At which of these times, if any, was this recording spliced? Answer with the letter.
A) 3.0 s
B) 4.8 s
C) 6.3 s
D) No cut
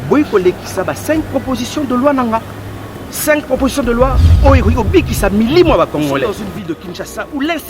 C